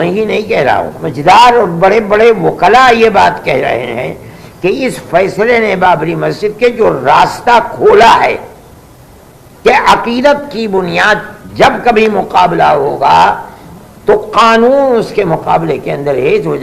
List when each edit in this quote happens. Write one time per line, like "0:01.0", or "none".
0:01.0